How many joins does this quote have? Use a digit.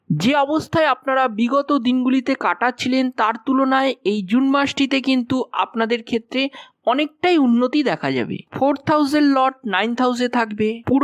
1